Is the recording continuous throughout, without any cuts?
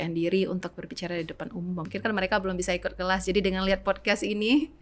no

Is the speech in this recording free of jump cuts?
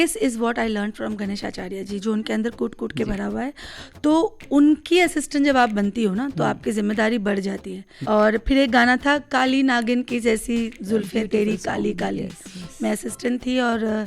no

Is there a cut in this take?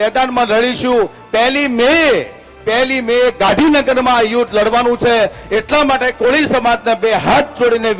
no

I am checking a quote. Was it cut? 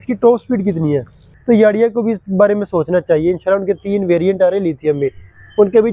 yes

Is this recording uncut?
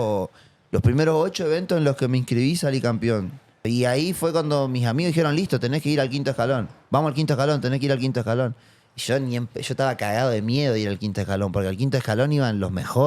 no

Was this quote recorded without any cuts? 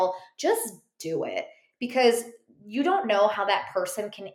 yes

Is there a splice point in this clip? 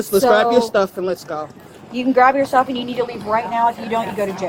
no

